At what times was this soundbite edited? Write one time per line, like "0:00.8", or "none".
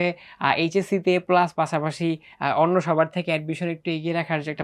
none